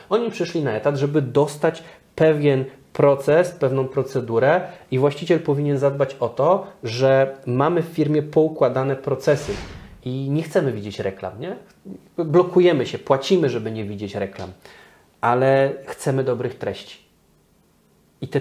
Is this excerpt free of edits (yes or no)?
no